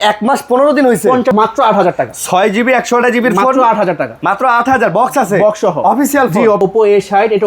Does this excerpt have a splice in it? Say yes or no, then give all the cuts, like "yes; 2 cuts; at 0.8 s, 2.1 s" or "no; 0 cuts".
yes; 2 cuts; at 1.3 s, 6.6 s